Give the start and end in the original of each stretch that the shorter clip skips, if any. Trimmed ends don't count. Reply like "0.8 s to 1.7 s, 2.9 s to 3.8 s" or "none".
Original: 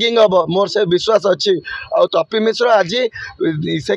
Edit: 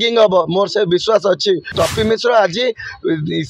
1.8 s to 2.1 s